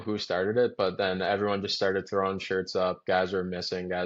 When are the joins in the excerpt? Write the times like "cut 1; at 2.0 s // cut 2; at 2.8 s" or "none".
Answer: none